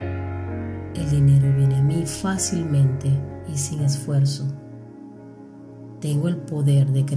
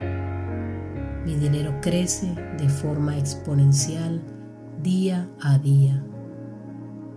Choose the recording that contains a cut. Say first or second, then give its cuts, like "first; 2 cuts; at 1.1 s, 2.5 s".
second; 1 cut; at 1.0 s